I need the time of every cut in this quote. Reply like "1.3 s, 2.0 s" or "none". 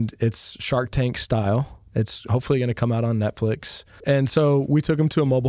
1.8 s, 3.9 s